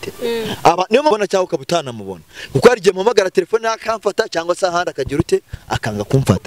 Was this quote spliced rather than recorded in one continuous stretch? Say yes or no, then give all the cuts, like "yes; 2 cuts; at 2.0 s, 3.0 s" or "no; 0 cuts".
yes; 1 cut; at 1.1 s